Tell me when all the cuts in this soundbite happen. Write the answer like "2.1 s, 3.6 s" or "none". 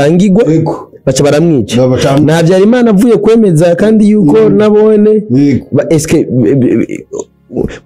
none